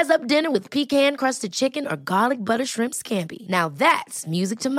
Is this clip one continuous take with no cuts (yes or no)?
yes